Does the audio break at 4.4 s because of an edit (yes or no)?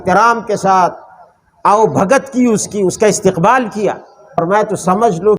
yes